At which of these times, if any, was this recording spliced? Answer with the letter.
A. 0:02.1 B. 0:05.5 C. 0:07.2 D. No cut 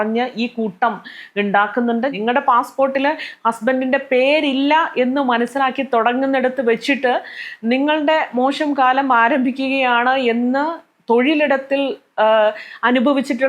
A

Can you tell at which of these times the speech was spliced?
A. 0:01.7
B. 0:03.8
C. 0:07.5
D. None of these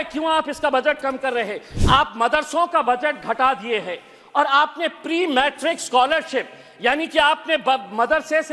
A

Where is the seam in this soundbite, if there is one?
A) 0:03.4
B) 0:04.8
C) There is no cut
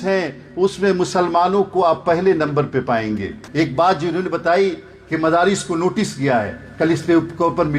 A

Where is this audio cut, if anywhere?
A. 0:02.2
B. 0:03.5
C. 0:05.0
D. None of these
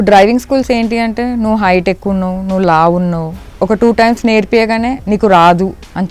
C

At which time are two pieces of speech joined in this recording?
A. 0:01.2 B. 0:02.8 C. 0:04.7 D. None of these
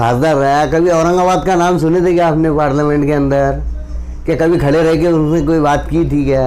D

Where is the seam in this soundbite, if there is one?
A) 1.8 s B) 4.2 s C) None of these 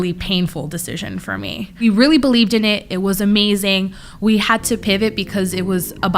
A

